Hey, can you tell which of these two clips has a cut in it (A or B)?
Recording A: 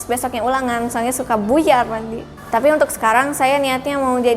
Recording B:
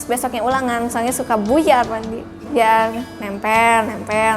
A